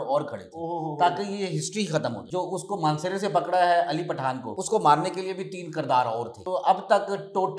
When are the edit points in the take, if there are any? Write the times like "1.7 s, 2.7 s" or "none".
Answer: 2.2 s, 4.5 s, 6.3 s